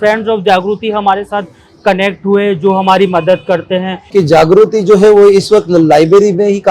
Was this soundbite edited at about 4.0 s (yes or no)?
yes